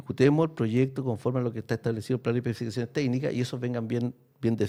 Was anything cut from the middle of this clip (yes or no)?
no